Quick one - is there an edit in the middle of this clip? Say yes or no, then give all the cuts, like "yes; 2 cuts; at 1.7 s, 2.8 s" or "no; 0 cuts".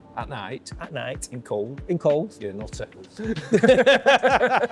no; 0 cuts